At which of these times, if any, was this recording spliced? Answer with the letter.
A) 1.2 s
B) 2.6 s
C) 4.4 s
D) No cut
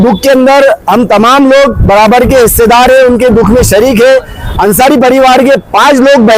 C